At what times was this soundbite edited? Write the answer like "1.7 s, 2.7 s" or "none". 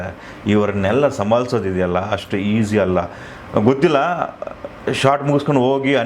none